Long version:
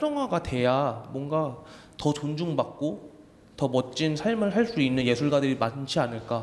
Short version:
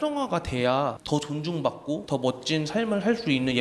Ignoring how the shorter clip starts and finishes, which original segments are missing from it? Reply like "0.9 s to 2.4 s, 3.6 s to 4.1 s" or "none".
1.0 s to 1.9 s, 3.0 s to 3.5 s